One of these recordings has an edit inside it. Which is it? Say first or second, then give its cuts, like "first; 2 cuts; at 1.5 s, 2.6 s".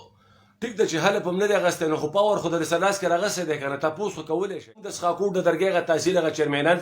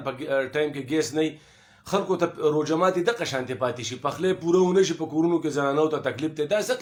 first; 1 cut; at 4.9 s